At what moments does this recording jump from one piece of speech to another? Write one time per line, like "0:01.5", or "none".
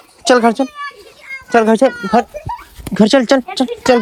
none